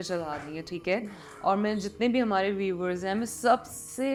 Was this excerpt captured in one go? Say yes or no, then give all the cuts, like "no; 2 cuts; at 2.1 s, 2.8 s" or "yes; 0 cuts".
yes; 0 cuts